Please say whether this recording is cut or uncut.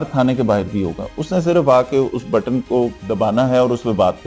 uncut